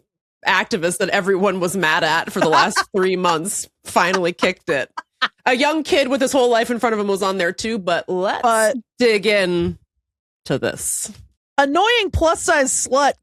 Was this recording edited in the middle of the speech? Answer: yes; 1 cut; at 11.6 s

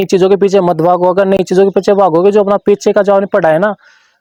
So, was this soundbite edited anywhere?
no; 0 cuts

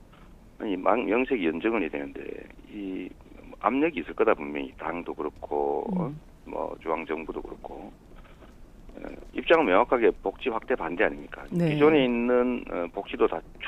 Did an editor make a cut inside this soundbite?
yes; 1 cut; at 10.6 s

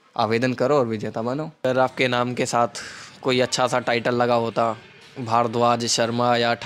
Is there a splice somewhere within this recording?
yes; 1 cut; at 1.6 s

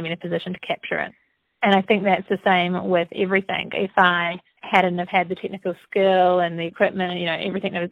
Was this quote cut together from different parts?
yes; 1 cut; at 3.6 s

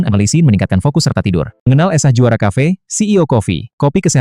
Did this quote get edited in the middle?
yes; 1 cut; at 1.6 s

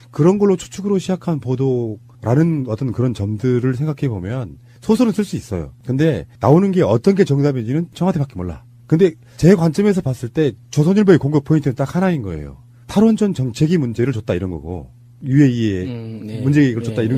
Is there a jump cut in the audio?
no; 0 cuts

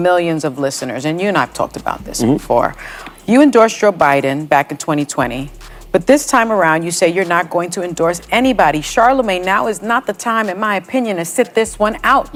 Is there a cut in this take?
no; 0 cuts

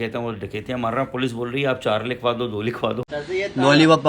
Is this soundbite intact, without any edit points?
no; 1 cut; at 3.2 s

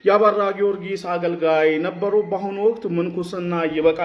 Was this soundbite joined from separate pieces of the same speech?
no; 0 cuts

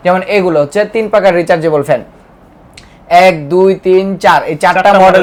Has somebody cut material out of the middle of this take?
no; 0 cuts

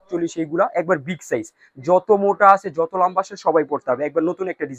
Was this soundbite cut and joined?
no; 0 cuts

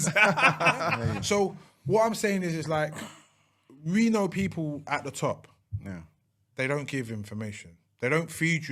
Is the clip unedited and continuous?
no; 1 cut; at 1.0 s

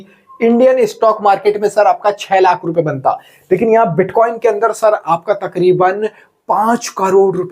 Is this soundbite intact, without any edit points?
yes; 0 cuts

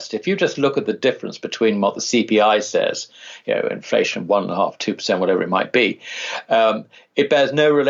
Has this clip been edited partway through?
no; 0 cuts

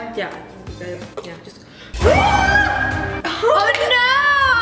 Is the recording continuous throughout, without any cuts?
yes; 0 cuts

